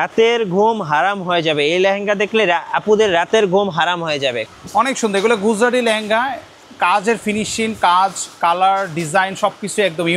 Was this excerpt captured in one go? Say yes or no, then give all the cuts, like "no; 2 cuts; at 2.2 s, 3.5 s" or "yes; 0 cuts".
no; 1 cut; at 4.4 s